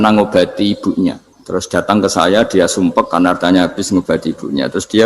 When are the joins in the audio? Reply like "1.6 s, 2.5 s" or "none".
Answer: 1.3 s